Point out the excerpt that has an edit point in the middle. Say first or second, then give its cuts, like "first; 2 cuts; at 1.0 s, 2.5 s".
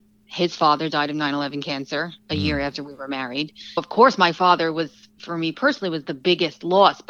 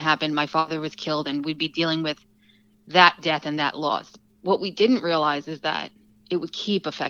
first; 1 cut; at 3.8 s